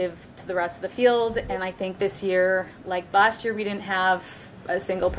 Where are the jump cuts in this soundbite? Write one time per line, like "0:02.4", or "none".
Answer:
none